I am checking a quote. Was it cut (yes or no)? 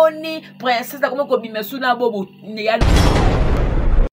yes